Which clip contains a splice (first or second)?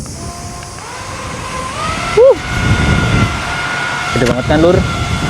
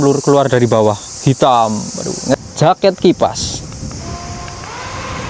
second